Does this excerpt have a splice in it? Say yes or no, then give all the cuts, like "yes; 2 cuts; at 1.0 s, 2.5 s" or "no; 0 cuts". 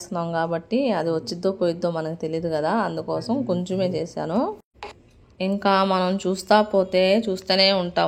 no; 0 cuts